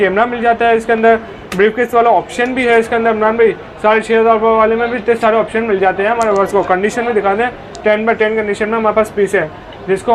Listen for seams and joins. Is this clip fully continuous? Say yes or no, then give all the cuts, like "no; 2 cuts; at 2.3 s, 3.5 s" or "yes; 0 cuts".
yes; 0 cuts